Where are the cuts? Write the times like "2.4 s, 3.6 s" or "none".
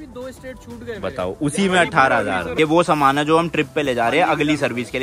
2.5 s